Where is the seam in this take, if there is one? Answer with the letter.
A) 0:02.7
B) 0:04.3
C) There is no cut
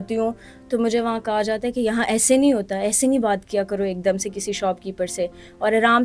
C